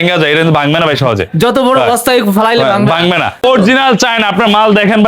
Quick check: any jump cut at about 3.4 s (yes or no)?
yes